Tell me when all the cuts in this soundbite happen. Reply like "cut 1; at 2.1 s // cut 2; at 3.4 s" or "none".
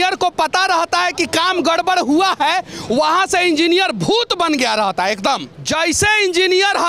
cut 1; at 5.5 s